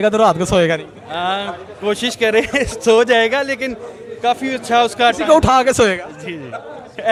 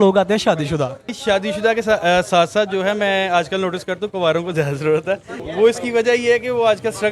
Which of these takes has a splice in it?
second; 2 cuts; at 1.0 s, 5.3 s

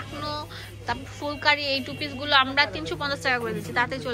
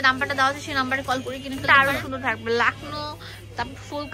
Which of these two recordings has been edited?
second; 1 cut; at 1.6 s

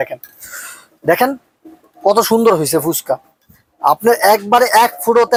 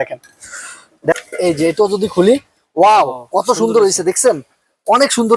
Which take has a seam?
second; 1 cut; at 1.1 s

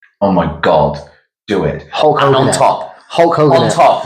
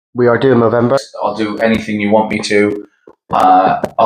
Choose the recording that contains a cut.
second; 1 cut; at 1.1 s

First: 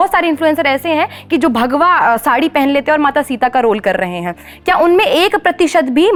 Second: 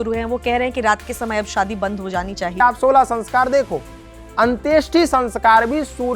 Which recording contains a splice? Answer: second; 1 cut; at 2.6 s

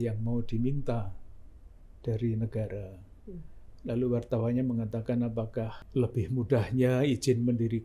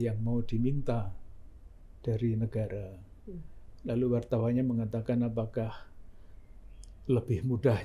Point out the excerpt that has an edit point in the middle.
first; 1 cut; at 5.8 s

